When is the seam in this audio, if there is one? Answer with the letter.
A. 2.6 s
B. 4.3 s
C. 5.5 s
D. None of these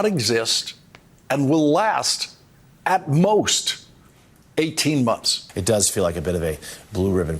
C